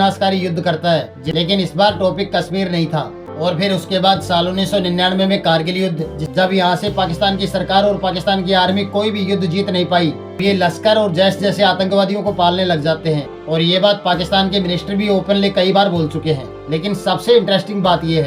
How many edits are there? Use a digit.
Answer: 4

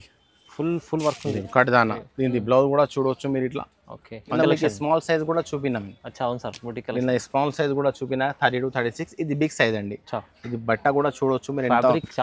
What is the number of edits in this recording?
1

